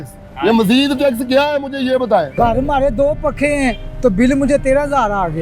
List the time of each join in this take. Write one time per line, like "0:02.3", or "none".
none